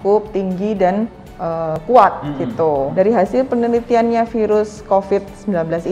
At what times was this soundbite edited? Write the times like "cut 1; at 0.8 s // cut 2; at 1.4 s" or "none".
cut 1; at 1.7 s // cut 2; at 2.9 s